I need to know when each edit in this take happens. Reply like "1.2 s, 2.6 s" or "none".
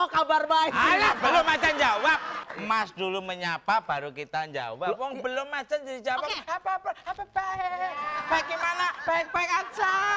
2.5 s